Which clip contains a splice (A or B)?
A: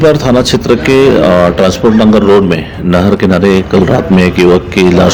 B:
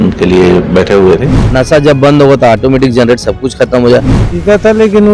B